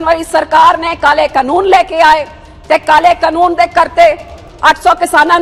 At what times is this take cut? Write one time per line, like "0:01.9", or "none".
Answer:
none